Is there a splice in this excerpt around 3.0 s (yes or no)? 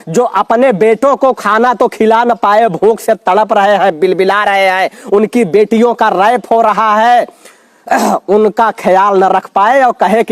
no